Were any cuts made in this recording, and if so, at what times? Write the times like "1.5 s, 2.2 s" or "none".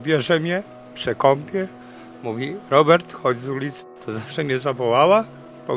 3.8 s